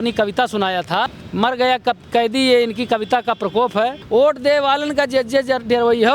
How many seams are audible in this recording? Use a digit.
2